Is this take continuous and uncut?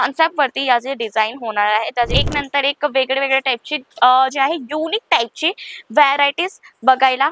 no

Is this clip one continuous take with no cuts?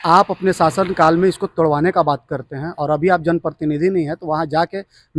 yes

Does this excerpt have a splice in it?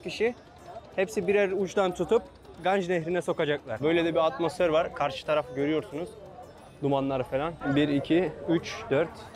yes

